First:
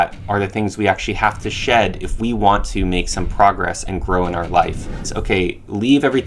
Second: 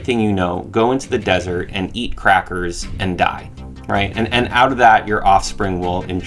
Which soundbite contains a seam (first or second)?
first